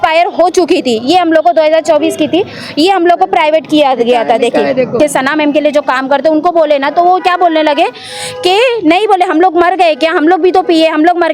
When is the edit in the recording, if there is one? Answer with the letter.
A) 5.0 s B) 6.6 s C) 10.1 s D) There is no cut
A